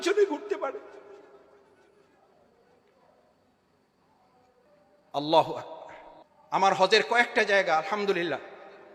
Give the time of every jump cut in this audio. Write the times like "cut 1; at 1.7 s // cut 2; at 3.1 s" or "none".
cut 1; at 4.6 s